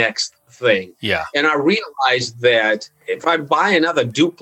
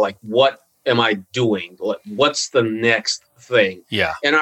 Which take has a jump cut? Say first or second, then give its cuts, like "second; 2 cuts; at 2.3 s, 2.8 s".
first; 1 cut; at 2.9 s